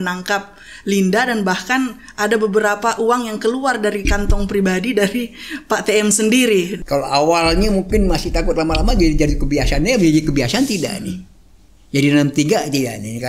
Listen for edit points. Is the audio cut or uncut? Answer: cut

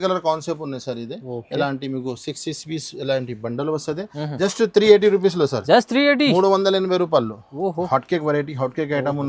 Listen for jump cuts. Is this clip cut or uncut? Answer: cut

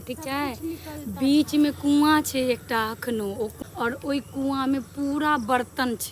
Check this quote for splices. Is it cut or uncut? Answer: cut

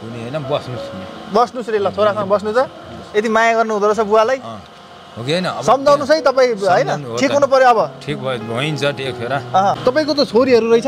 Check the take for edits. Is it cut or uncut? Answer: cut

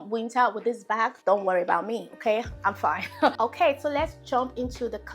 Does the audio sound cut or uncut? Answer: uncut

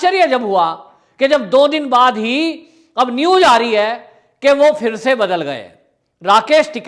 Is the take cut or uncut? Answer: uncut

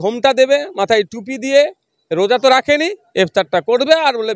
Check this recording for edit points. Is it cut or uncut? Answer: uncut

